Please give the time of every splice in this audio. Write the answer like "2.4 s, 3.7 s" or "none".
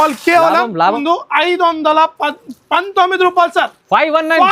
1.0 s